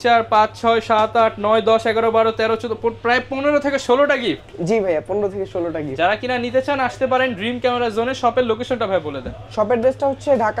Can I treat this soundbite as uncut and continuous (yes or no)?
yes